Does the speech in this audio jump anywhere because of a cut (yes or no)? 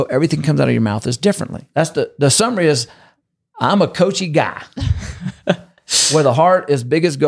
yes